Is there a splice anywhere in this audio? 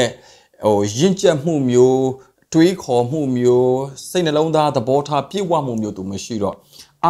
no; 0 cuts

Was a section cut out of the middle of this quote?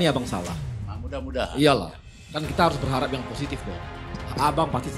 no; 0 cuts

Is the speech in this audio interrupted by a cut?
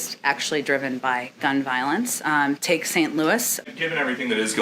yes; 1 cut; at 3.6 s

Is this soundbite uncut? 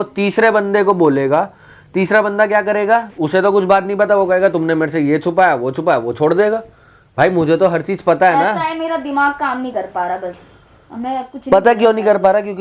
yes; 0 cuts

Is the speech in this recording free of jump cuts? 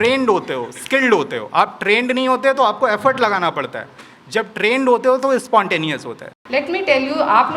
no; 1 cut; at 6.4 s

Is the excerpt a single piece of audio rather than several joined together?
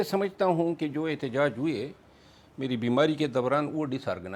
yes; 0 cuts

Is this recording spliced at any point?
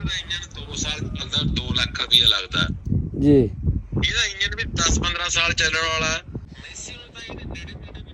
yes; 1 cut; at 6.5 s

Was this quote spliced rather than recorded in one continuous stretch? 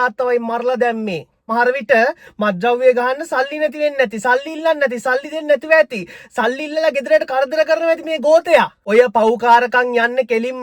yes; 2 cuts; at 1.4 s, 8.8 s

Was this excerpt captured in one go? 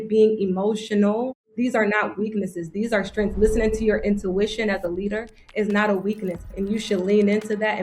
no; 2 cuts; at 1.5 s, 6.5 s

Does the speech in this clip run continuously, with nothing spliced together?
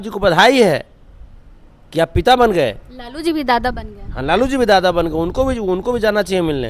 yes; 0 cuts

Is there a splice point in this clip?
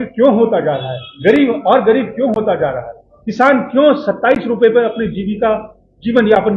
no; 0 cuts

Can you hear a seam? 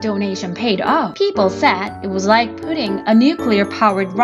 yes; 2 cuts; at 1.1 s, 1.9 s

